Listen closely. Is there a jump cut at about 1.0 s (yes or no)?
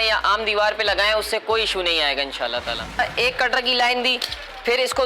no